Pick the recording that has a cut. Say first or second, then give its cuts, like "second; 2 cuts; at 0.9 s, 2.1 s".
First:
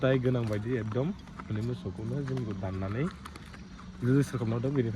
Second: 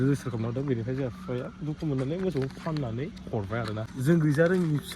second; 1 cut; at 3.9 s